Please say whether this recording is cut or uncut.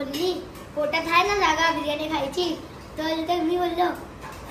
uncut